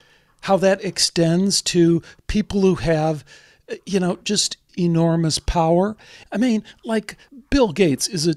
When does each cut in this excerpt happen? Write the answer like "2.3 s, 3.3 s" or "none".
4.6 s, 6.2 s, 7.3 s